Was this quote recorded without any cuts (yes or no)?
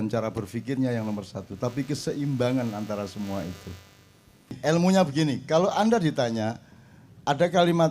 no